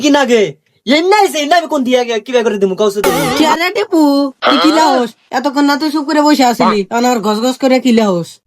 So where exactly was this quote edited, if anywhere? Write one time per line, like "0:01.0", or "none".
0:03.3